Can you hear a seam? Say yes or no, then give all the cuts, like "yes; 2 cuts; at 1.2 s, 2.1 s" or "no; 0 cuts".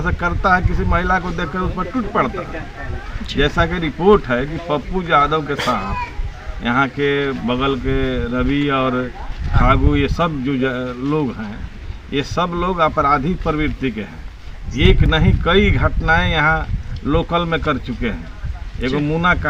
no; 0 cuts